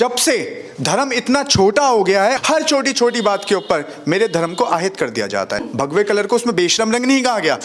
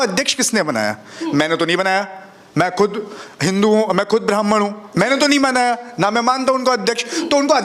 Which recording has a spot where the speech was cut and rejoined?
first; 2 cuts; at 2.4 s, 5.7 s

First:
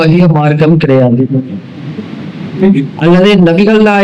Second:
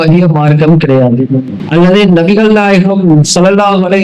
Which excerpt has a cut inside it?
second; 1 cut; at 1.6 s

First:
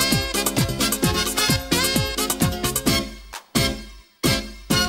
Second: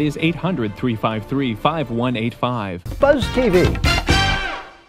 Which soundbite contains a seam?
second; 1 cut; at 2.8 s

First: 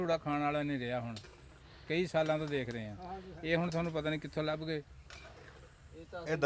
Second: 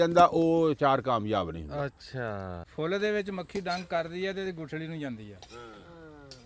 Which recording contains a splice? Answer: second; 1 cut; at 2.6 s

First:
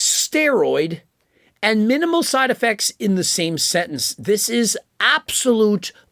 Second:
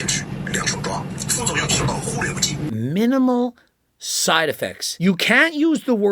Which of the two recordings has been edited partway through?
second; 3 cuts; at 1.1 s, 2.6 s, 4.8 s

